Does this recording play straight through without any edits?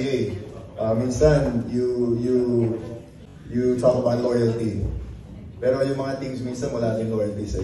yes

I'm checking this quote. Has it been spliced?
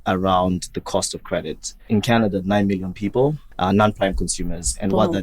yes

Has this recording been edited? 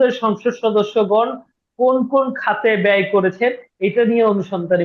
no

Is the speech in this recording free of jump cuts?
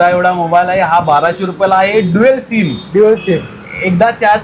yes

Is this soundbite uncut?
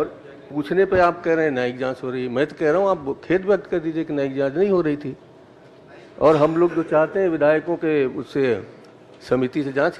yes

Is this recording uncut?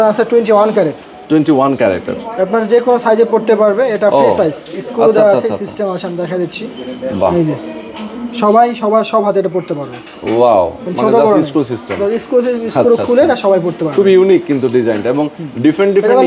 yes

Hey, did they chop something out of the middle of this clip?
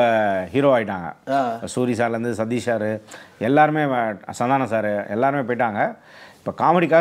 no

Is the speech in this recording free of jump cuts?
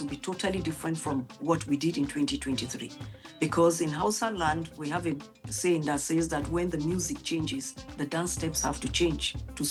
yes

